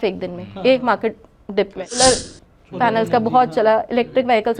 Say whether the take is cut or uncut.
cut